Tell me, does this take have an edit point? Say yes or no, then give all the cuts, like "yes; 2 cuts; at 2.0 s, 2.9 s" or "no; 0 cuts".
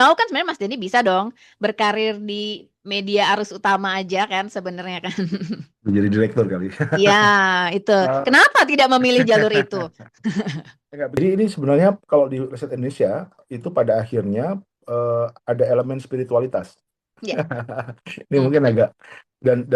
yes; 1 cut; at 11.2 s